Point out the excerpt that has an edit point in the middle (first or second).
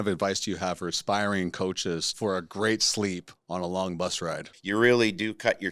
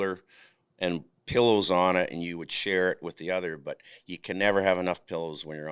first